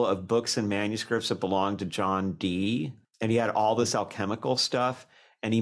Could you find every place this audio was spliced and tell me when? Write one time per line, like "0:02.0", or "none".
0:03.0